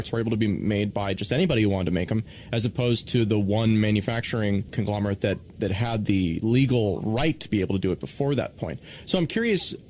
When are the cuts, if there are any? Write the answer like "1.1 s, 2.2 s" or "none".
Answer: 8.6 s